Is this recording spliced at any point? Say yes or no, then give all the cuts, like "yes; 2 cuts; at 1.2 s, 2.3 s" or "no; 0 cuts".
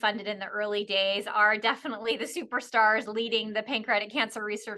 no; 0 cuts